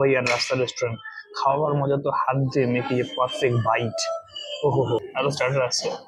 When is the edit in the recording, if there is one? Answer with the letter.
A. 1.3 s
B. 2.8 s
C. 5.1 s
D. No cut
C